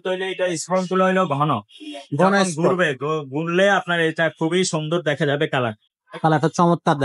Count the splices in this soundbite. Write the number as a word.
zero